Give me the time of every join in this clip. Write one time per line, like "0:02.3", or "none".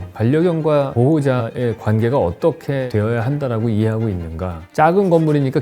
0:01.3
0:02.9
0:04.6